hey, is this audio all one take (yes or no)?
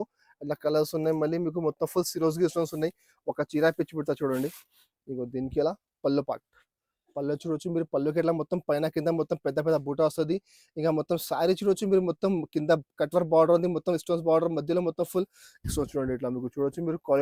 yes